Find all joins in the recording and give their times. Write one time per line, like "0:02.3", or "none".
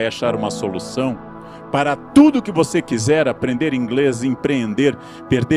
none